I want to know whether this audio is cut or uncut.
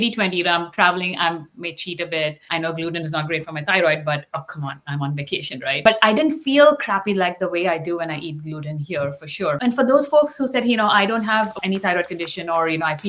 cut